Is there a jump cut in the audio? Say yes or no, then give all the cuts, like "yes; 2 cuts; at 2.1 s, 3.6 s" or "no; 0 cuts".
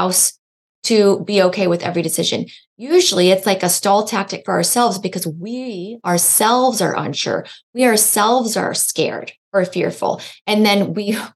no; 0 cuts